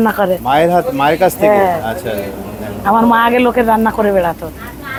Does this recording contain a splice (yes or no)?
no